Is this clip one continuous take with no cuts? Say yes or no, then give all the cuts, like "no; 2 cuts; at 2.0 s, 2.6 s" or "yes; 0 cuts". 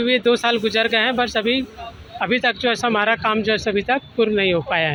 yes; 0 cuts